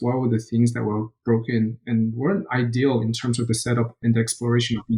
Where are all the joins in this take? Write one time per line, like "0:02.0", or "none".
0:04.0

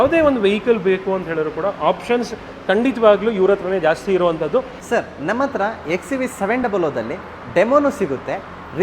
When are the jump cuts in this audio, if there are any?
0:04.8

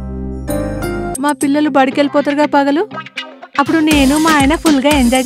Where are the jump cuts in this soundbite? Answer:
0:01.1

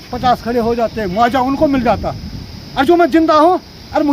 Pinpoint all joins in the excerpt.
none

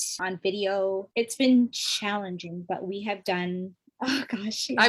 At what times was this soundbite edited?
0:01.1

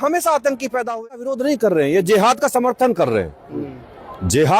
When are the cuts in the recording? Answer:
0:01.0

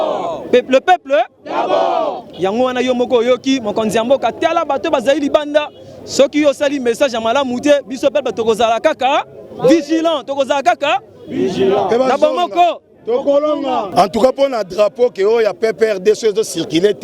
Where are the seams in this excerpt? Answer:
0:13.9

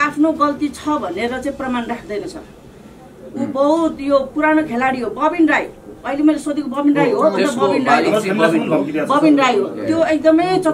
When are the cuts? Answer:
none

